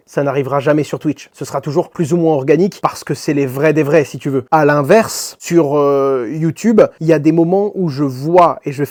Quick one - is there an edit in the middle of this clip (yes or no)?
no